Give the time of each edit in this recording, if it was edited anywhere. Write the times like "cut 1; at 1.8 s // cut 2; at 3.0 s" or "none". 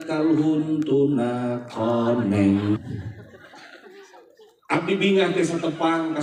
cut 1; at 2.8 s